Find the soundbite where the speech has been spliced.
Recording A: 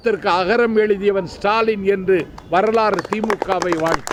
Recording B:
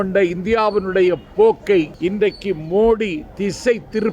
B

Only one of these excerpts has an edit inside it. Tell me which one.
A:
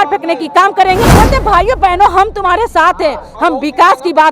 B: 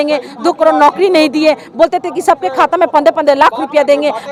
A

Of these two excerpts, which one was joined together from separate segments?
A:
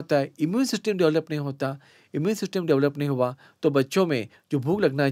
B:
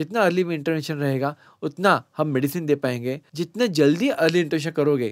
B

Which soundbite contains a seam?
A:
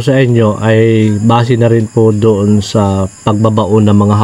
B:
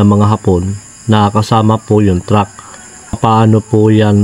B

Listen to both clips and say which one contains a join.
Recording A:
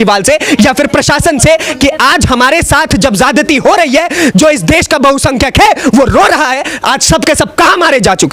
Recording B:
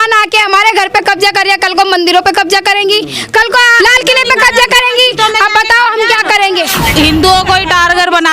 B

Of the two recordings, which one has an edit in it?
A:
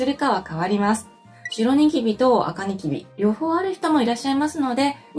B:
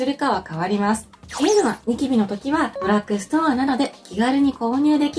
B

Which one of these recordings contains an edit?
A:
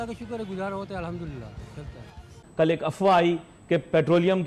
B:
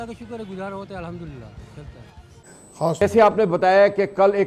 A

